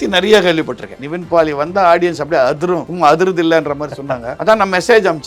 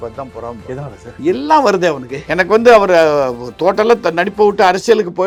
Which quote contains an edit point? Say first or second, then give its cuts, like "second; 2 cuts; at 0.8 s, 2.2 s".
first; 3 cuts; at 1.0 s, 2.9 s, 4.3 s